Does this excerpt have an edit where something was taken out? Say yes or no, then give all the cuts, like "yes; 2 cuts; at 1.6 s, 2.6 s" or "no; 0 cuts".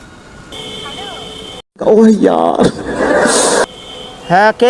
no; 0 cuts